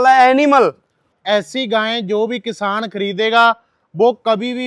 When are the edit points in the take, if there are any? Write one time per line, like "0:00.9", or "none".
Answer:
0:01.1

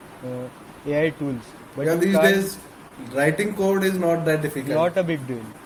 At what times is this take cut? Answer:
none

